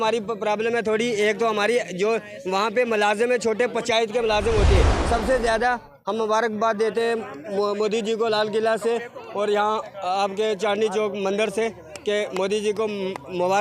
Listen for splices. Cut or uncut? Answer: cut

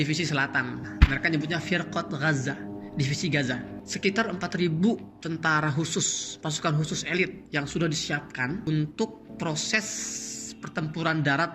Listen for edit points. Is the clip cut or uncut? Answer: cut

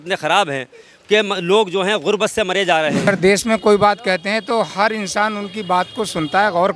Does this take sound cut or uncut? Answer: cut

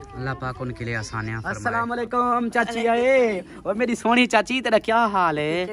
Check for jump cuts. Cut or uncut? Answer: cut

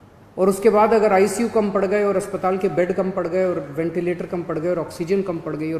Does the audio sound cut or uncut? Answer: uncut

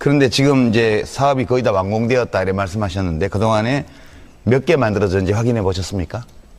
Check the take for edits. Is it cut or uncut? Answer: uncut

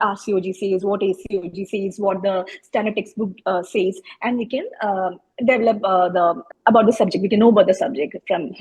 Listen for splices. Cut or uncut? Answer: uncut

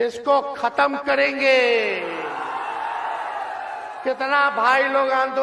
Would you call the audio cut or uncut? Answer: uncut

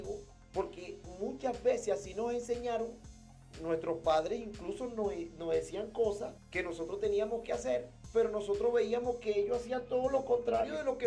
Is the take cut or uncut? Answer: cut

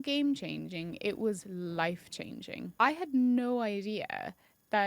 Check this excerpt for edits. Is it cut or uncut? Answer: cut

